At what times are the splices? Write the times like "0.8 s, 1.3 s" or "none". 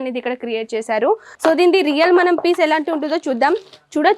1.3 s